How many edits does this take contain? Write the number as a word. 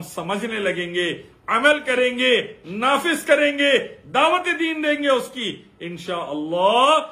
zero